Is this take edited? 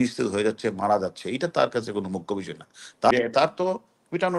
yes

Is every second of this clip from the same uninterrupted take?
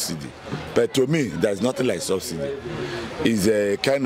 yes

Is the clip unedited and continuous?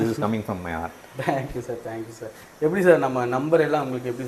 yes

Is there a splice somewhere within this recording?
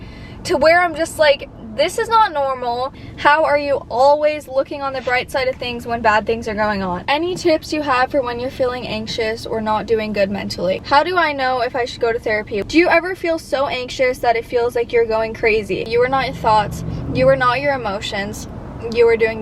yes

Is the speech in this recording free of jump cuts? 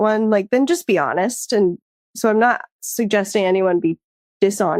yes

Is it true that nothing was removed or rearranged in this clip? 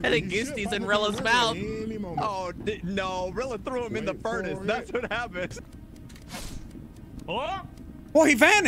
no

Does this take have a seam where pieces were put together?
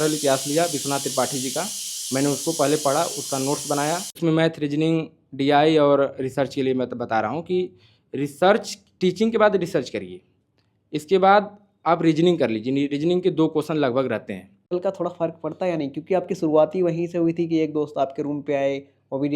yes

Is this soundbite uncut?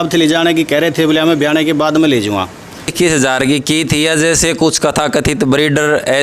no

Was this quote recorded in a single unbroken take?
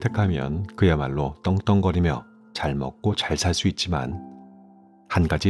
yes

